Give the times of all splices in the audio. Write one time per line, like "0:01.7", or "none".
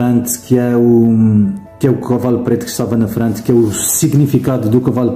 0:01.6